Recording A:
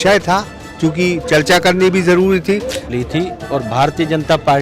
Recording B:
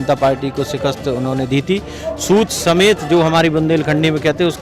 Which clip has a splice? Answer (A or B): A